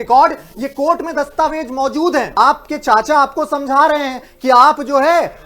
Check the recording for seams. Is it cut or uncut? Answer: cut